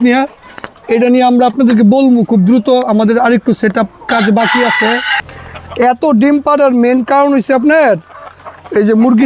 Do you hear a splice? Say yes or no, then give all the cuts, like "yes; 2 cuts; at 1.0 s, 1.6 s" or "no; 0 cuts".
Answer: yes; 1 cut; at 5.3 s